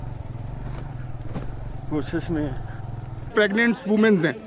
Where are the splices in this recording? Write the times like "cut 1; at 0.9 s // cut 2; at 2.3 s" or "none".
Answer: cut 1; at 3.3 s

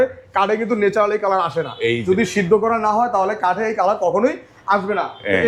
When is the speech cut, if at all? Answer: none

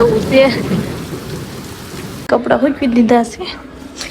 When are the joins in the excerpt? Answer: cut 1; at 2.3 s

